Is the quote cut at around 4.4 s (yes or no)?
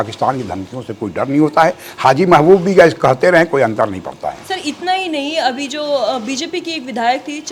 no